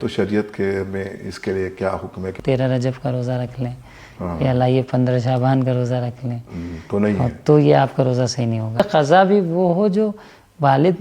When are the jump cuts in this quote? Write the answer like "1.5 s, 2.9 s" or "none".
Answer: 2.3 s, 8.8 s